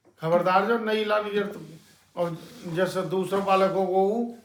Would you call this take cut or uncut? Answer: uncut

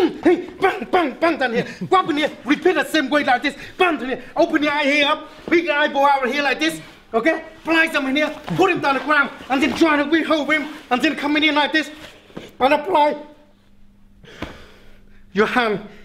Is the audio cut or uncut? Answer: uncut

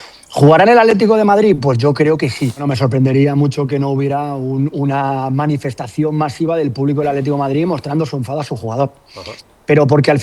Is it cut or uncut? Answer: cut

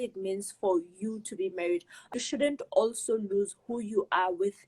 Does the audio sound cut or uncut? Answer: cut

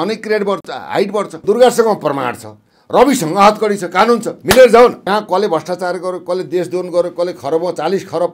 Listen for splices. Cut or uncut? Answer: cut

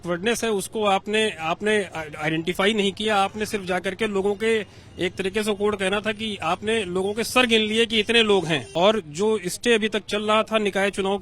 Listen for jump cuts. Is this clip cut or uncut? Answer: cut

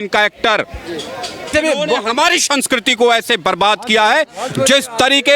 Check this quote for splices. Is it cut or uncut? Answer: cut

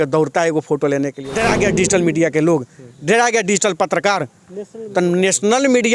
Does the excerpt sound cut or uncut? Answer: cut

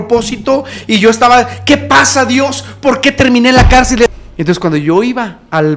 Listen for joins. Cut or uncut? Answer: cut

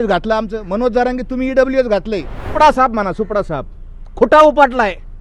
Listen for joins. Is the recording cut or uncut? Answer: cut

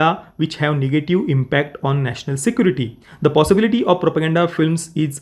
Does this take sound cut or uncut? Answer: cut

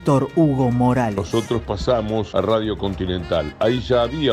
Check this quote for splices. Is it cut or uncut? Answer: cut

